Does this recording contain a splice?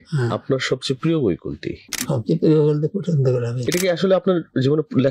yes; 1 cut; at 3.5 s

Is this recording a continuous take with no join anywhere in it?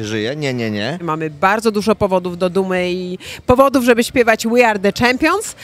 no; 1 cut; at 1.0 s

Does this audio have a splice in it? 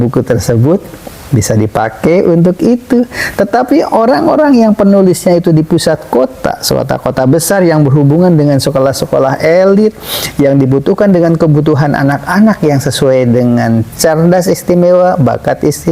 no; 0 cuts

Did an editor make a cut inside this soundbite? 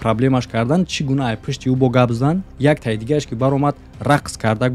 no; 0 cuts

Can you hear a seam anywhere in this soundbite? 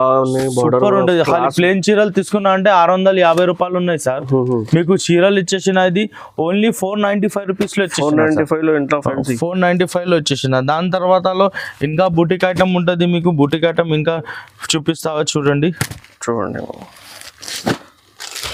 no; 0 cuts

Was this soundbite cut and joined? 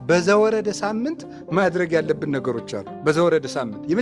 no; 0 cuts

